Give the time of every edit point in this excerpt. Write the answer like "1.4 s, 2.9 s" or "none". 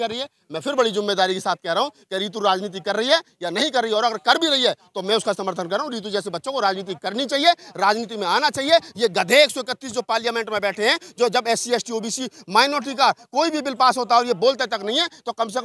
none